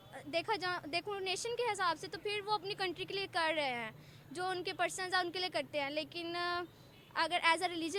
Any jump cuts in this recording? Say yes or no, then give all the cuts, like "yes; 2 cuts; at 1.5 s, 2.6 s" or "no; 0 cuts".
no; 0 cuts